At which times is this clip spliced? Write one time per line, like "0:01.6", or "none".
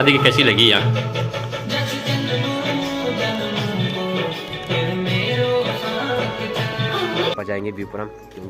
0:07.4